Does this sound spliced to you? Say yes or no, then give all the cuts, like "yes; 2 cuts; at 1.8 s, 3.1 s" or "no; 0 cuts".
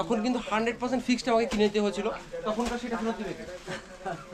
no; 0 cuts